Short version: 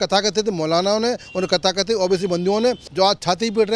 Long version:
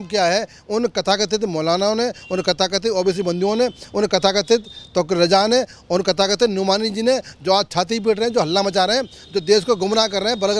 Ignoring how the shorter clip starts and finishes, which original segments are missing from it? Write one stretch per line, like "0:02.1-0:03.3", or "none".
0:03.8-0:07.3